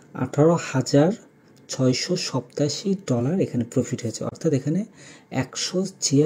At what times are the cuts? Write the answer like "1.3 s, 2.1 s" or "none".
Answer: none